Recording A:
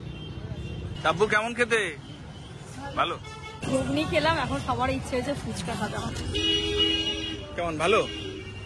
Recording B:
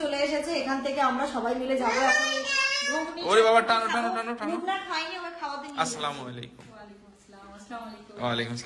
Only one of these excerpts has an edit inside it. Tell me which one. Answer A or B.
A